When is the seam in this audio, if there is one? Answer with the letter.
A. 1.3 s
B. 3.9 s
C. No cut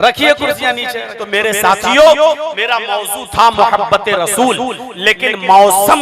A